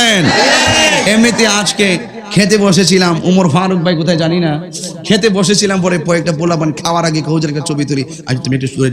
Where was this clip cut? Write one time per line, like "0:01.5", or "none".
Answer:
0:01.0